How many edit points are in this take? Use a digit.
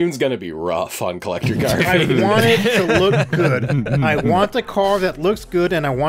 0